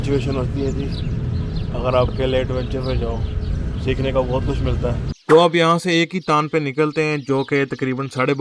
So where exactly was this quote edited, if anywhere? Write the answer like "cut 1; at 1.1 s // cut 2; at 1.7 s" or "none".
cut 1; at 5.1 s